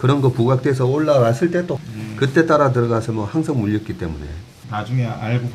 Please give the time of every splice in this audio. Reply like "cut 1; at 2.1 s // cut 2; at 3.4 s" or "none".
cut 1; at 1.8 s // cut 2; at 4.5 s